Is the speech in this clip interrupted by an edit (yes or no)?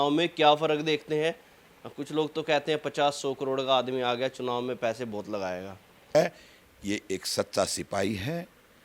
yes